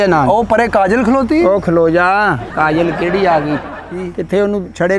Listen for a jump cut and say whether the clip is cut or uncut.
uncut